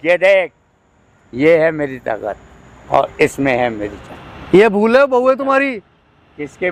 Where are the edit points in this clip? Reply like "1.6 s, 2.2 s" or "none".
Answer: none

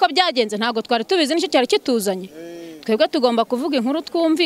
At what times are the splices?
none

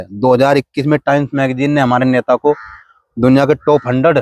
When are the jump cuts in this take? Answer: none

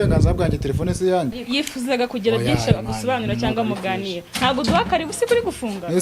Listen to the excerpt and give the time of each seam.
1.4 s

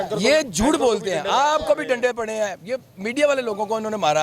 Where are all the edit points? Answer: none

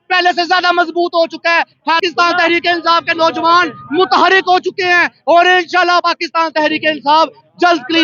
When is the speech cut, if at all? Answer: 2.0 s

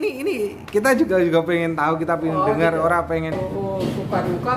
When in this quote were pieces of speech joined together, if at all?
3.4 s

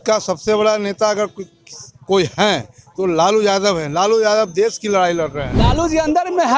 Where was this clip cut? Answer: 5.5 s

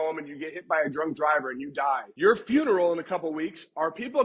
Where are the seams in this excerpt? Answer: 2.1 s

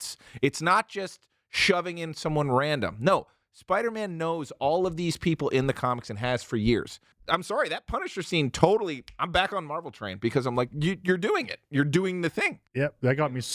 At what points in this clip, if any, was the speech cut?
7.1 s, 12.6 s

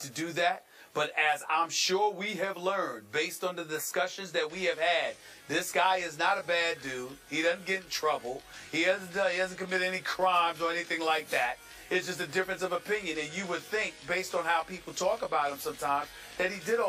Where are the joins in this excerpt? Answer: 7.2 s

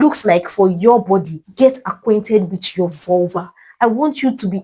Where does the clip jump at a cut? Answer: 1.4 s

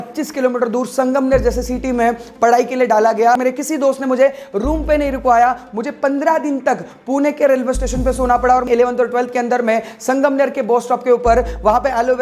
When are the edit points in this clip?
3.4 s, 8.7 s

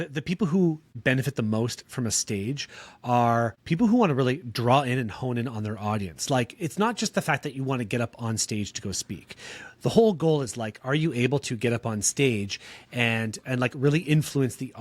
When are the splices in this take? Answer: 0.9 s, 3.6 s

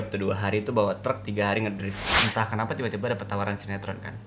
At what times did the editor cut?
2.1 s

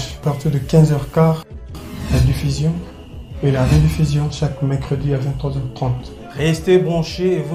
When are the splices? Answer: none

